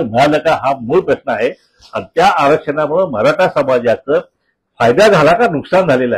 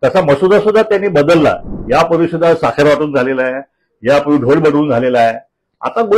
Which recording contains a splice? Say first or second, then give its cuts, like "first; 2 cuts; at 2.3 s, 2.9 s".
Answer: second; 1 cut; at 1.7 s